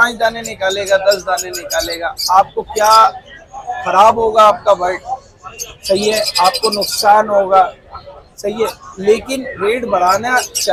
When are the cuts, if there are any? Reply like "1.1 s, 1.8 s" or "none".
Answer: none